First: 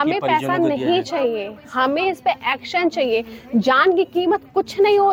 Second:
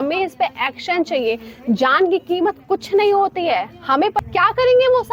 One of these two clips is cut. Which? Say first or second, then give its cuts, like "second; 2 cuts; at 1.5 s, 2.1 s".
second; 1 cut; at 4.2 s